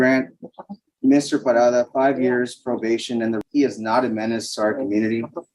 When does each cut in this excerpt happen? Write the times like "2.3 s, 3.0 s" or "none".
3.4 s